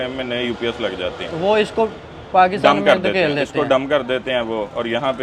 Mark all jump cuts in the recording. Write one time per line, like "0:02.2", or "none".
none